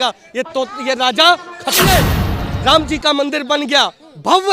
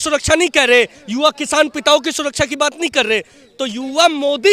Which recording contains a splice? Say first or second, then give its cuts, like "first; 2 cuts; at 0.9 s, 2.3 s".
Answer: first; 1 cut; at 1.9 s